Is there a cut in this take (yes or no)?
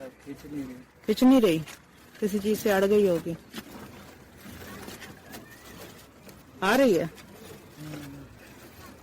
no